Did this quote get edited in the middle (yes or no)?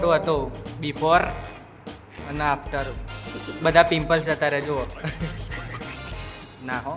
no